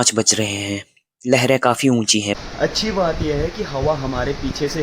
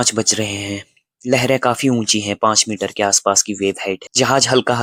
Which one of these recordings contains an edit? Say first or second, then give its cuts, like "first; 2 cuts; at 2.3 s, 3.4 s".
first; 1 cut; at 2.4 s